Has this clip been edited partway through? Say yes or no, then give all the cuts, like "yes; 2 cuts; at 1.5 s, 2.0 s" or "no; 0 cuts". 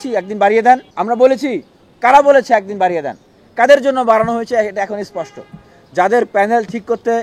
yes; 1 cut; at 0.9 s